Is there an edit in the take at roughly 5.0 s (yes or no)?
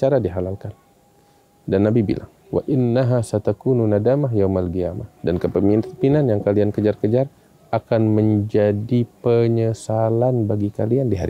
yes